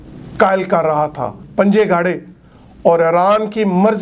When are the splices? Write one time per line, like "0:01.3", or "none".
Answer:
0:01.4